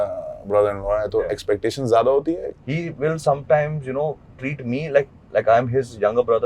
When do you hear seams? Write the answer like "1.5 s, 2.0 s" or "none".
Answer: 2.5 s